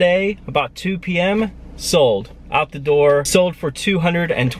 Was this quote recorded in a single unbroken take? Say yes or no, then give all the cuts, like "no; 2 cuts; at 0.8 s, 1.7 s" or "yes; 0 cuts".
no; 1 cut; at 3.3 s